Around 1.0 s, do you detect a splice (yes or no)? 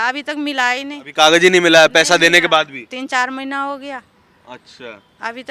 yes